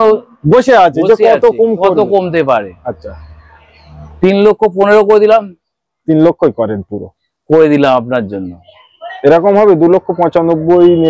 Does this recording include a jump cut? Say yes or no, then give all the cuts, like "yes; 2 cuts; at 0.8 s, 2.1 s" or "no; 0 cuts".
no; 0 cuts